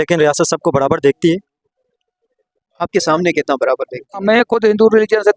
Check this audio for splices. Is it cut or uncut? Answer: cut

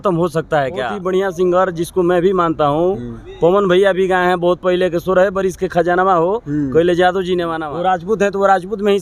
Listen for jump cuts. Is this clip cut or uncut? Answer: cut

